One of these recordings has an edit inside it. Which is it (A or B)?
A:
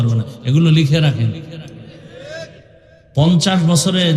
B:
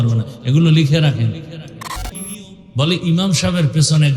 B